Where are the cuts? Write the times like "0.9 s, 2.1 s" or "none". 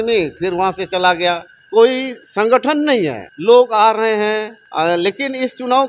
1.5 s, 3.3 s, 4.6 s